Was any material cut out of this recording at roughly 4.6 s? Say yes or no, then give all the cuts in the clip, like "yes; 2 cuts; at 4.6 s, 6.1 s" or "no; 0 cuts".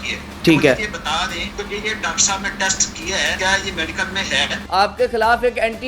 yes; 3 cuts; at 1.5 s, 3.4 s, 4.6 s